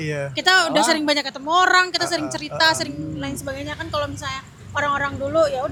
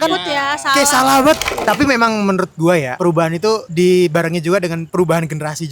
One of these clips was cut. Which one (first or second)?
second